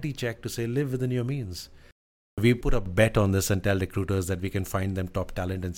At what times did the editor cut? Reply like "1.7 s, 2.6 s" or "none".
2.4 s